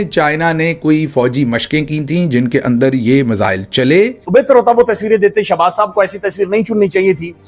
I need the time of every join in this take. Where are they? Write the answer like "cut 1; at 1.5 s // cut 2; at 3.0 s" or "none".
cut 1; at 4.2 s